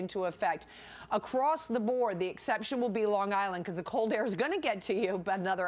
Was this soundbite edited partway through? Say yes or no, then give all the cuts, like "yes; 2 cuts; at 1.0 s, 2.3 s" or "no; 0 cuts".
yes; 1 cut; at 2.3 s